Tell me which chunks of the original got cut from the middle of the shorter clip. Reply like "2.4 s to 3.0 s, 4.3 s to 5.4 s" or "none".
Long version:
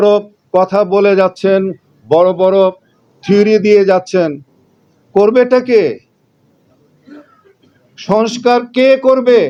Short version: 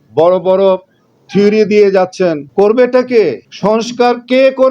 4.4 s to 5.0 s, 6.0 s to 7.9 s

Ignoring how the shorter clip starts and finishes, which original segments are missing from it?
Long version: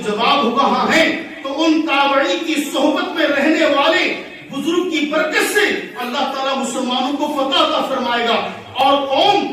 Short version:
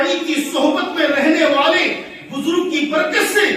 none

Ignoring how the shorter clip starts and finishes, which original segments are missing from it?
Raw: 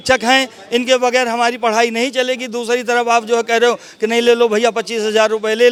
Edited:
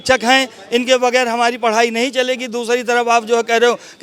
none

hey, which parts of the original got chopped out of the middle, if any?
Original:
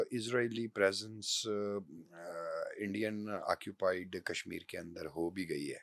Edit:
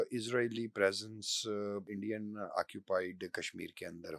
1.9 s to 2.8 s

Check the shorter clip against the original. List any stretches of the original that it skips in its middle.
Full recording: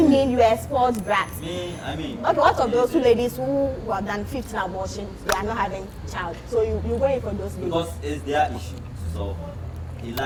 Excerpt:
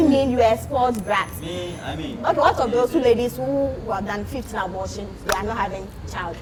none

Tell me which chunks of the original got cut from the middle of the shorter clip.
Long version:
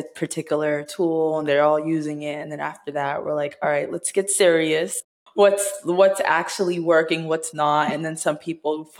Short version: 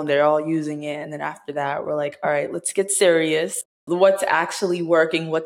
5.2 s to 5.7 s

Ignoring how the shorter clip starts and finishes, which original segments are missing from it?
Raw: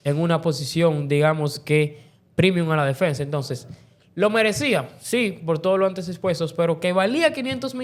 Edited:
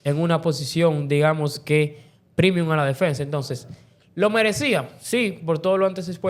none

